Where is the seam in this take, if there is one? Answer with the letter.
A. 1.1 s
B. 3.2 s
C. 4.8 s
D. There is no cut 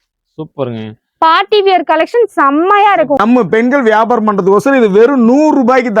B